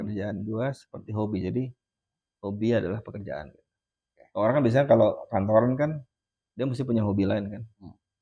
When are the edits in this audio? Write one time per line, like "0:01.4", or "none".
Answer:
none